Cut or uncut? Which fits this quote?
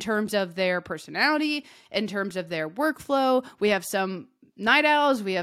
uncut